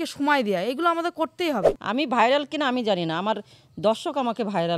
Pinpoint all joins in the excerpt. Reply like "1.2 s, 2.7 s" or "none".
1.8 s